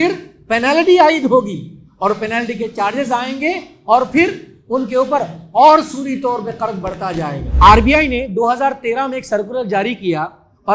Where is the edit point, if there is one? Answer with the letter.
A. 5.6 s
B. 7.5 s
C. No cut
B